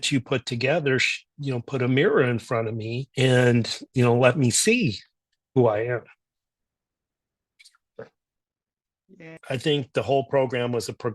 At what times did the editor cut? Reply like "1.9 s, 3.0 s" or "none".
9.3 s